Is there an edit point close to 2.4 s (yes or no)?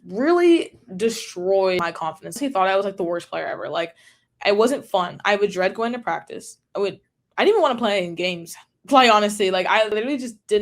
yes